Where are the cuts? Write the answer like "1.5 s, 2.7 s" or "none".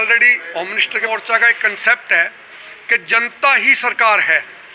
1.0 s

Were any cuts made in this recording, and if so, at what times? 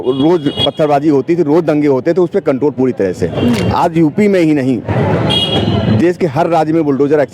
3.6 s

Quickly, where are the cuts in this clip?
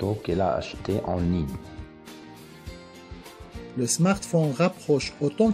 1.8 s, 3.7 s

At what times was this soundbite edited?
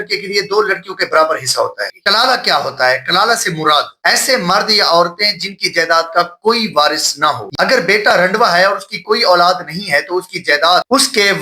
1.8 s, 7.5 s

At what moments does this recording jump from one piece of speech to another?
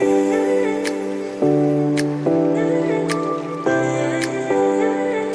none

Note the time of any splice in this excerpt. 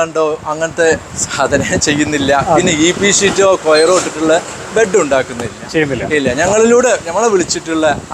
none

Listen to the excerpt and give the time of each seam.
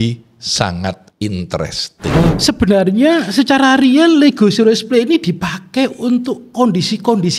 1.1 s, 2.3 s

